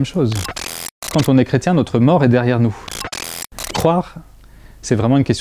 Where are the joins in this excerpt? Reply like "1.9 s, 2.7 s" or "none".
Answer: 0.9 s, 3.1 s